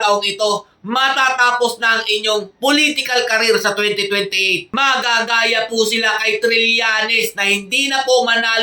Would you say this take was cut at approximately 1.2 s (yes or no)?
no